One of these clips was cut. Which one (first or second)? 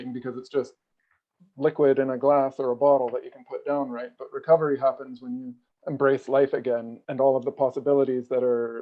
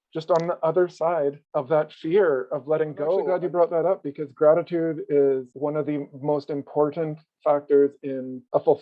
second